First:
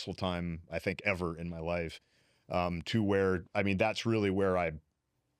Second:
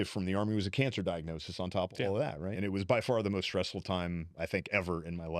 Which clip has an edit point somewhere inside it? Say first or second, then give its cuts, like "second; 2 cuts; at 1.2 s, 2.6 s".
second; 1 cut; at 2.5 s